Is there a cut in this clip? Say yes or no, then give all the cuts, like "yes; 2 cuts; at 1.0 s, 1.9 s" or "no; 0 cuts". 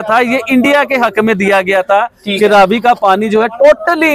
no; 0 cuts